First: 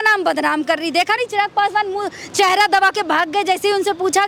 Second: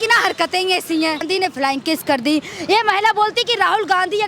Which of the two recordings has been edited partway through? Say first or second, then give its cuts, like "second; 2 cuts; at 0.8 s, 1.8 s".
second; 1 cut; at 1.2 s